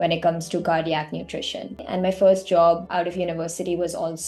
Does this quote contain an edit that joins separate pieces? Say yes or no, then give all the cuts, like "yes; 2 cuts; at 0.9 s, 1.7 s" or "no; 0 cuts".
yes; 2 cuts; at 1.8 s, 2.9 s